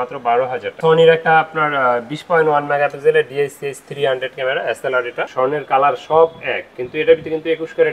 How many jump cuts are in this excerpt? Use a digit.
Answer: 2